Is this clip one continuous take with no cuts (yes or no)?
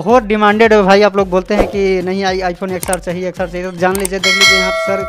yes